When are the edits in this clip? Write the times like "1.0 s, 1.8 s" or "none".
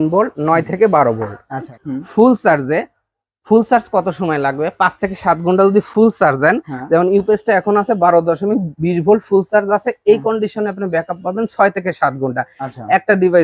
1.8 s

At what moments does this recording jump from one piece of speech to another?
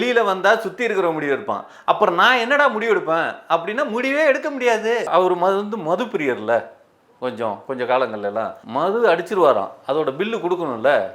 5.1 s, 8.6 s

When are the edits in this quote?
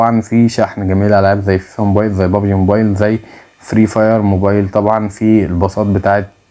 none

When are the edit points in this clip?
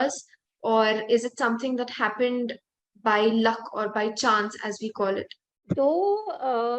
5.7 s

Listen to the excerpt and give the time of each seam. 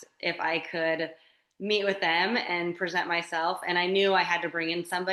none

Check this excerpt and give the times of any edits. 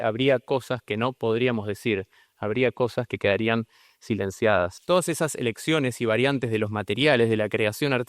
4.8 s

